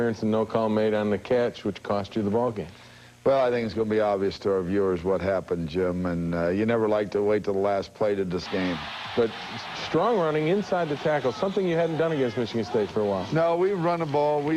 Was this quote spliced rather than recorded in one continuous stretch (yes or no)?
no